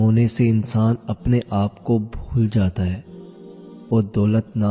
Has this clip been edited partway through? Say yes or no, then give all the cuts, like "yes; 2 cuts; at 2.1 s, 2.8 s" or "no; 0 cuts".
no; 0 cuts